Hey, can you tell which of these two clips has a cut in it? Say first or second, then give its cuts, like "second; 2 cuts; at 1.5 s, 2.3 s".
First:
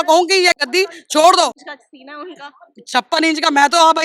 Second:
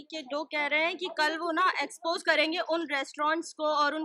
first; 1 cut; at 1.7 s